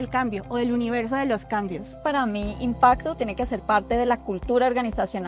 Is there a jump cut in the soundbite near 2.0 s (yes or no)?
yes